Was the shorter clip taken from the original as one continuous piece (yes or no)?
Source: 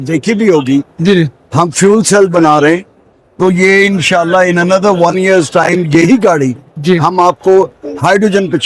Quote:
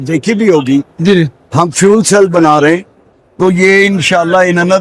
yes